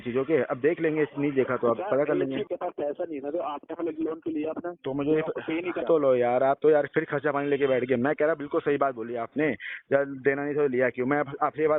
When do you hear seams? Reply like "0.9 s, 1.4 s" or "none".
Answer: 2.5 s, 5.8 s

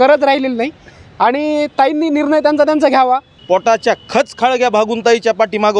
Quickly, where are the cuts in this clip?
3.4 s

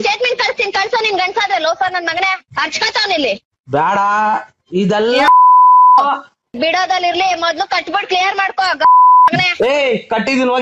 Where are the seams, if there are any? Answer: 6.5 s

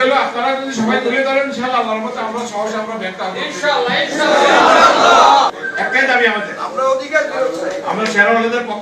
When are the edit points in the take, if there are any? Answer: 5.6 s

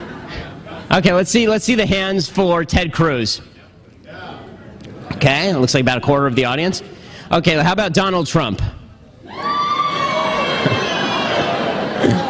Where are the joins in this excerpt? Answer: 6.9 s

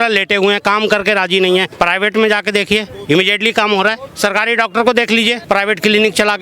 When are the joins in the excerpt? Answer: 1.7 s, 4.1 s, 5.4 s

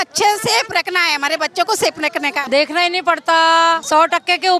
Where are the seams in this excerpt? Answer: 2.3 s, 3.8 s

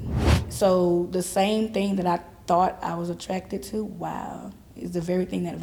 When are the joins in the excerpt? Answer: none

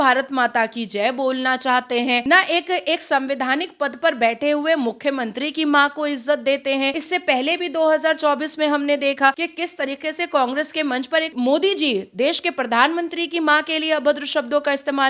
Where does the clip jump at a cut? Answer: 2.2 s, 7.0 s, 9.4 s, 11.3 s

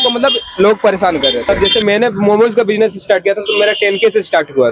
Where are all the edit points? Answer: 1.5 s

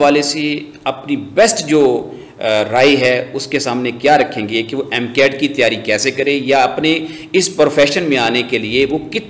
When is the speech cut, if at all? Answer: none

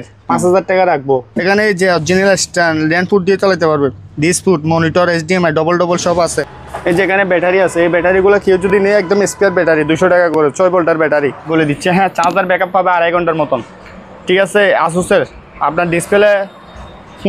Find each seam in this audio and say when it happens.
1.3 s, 6.5 s, 11.4 s

